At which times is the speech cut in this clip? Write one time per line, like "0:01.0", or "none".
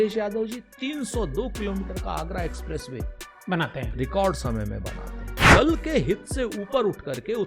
0:05.4

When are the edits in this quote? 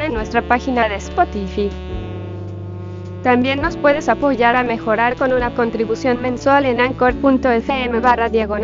none

